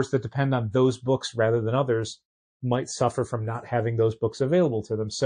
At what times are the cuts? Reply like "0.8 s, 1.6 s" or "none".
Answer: none